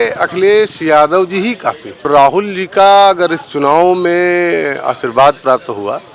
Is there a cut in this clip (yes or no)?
yes